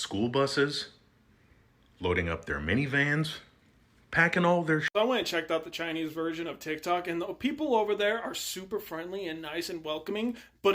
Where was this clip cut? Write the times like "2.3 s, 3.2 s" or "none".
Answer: 4.9 s